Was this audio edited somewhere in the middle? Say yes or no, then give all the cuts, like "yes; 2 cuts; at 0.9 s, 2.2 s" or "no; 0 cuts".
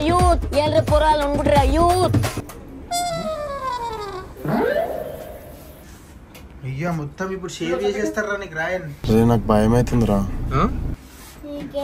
no; 0 cuts